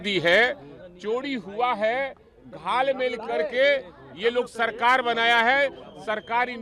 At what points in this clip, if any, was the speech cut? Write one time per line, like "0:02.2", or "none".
none